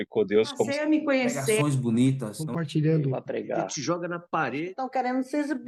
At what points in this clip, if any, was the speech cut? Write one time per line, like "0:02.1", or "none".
none